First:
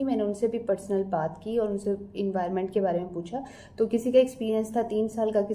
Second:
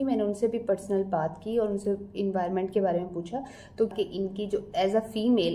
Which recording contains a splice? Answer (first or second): second